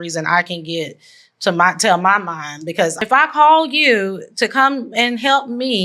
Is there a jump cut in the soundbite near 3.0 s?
yes; 1 cut; at 3.0 s

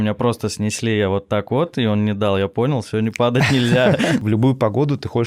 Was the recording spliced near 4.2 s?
yes; 1 cut; at 4.2 s

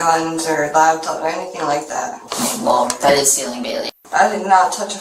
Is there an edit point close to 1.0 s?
no; 2 cuts; at 2.2 s, 3.7 s

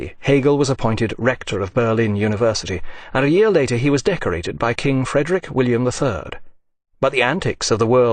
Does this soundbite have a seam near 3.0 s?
no; 1 cut; at 5.8 s

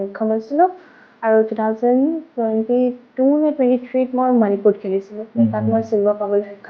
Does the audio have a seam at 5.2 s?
yes; 1 cut; at 5.2 s

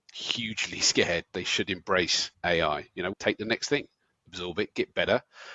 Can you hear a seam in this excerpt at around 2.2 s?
yes; 2 cuts; at 2.2 s, 3.1 s

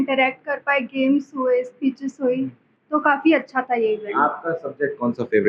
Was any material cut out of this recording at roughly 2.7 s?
no; 0 cuts

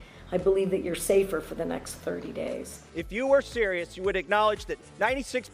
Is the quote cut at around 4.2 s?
no; 1 cut; at 2.8 s

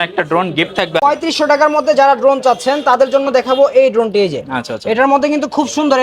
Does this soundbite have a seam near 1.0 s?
yes; 1 cut; at 1.0 s

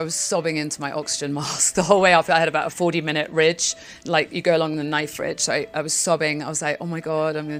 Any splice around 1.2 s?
no; 0 cuts

